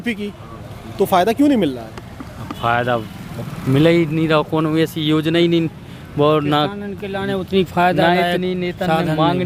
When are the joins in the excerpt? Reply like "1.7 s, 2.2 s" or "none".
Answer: none